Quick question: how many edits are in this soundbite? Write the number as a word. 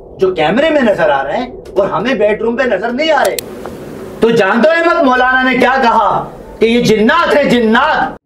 zero